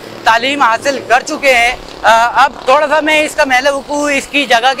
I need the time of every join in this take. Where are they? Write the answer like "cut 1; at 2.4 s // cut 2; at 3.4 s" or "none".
none